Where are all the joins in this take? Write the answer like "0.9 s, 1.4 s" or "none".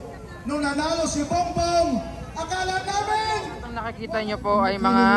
3.9 s